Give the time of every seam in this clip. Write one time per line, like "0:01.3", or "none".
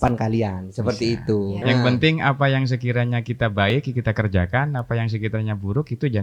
0:01.6